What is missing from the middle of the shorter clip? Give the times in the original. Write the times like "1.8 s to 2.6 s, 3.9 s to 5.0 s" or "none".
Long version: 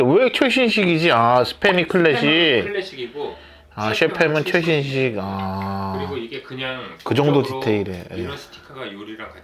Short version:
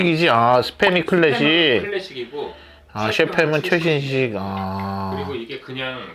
none